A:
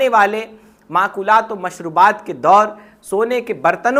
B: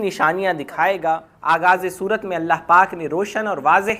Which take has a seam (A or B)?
B